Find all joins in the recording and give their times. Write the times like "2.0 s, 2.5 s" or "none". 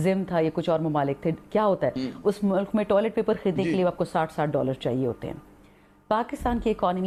none